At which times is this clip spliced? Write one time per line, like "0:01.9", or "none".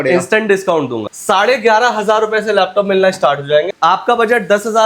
0:01.0
0:03.7